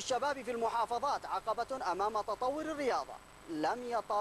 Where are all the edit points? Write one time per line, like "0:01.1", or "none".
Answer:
none